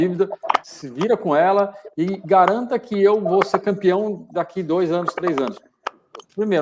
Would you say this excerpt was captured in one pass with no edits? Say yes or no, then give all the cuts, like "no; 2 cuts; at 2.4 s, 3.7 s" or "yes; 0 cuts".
yes; 0 cuts